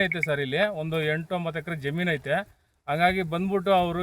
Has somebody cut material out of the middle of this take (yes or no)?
no